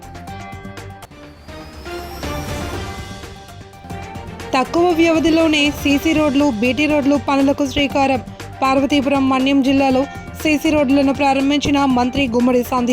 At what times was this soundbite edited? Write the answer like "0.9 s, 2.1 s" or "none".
1.0 s